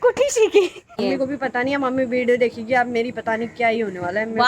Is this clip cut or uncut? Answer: cut